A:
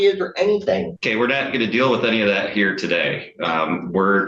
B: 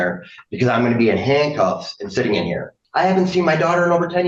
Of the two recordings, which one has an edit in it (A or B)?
B